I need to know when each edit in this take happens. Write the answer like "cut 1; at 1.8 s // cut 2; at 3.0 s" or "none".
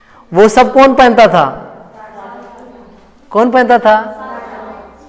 none